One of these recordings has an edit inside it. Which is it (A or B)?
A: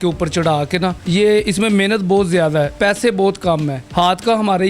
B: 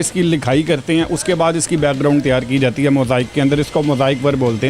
A